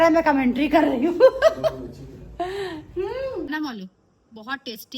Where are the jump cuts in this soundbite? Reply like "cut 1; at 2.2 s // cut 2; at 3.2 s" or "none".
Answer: cut 1; at 3.5 s